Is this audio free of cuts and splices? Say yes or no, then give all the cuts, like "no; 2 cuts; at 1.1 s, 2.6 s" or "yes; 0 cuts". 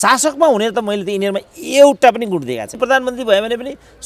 no; 1 cut; at 2.8 s